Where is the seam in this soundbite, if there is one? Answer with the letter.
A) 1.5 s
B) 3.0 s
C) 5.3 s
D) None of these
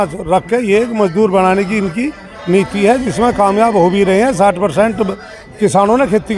D